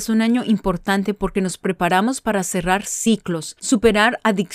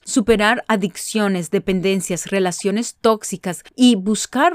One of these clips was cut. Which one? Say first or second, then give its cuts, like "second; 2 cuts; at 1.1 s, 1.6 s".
second; 1 cut; at 3.6 s